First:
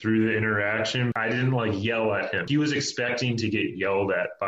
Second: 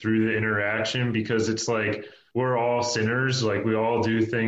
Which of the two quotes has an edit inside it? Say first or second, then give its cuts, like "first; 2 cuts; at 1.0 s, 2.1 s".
first; 2 cuts; at 1.1 s, 2.5 s